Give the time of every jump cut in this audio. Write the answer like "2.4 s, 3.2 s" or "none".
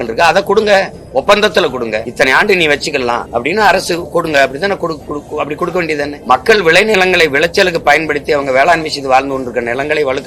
2.0 s, 3.2 s, 6.2 s